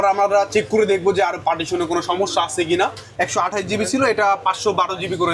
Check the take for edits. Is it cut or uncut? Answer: cut